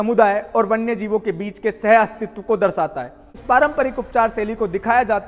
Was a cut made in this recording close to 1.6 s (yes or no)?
no